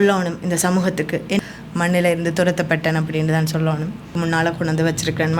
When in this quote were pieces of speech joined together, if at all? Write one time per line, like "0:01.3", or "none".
0:01.4
0:04.1